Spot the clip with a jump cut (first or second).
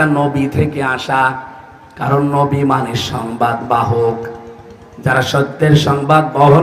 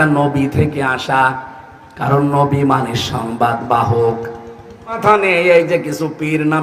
second